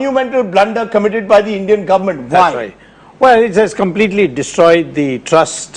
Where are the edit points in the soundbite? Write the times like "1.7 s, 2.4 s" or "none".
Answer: 4.1 s